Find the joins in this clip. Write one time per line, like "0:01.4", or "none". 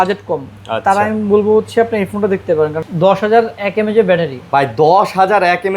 0:02.8